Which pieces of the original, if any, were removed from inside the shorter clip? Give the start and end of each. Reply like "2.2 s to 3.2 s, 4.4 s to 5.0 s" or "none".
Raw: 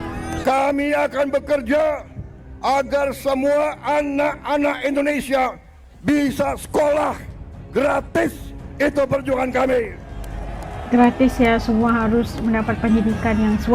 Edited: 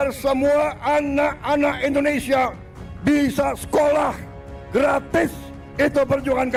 none